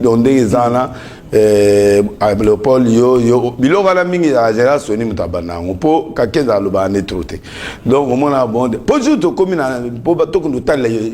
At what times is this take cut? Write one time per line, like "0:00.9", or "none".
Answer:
none